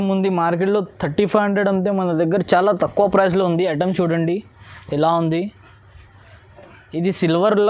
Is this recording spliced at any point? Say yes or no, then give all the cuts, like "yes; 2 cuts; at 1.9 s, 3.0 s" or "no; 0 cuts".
no; 0 cuts